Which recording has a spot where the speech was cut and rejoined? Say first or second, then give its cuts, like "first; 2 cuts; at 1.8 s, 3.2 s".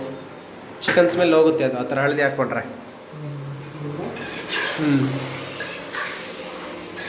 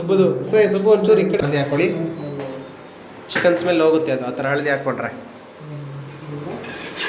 second; 1 cut; at 1.4 s